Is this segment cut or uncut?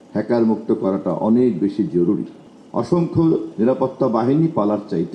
cut